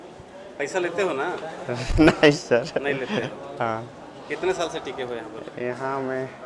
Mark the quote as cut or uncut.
uncut